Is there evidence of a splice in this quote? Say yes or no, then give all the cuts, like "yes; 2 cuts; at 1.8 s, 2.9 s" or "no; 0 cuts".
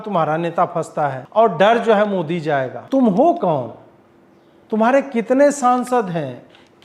yes; 2 cuts; at 1.2 s, 2.8 s